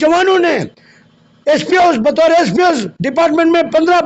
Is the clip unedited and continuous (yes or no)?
yes